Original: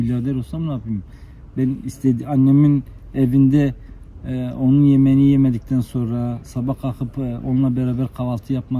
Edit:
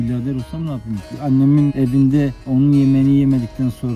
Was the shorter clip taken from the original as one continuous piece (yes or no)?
no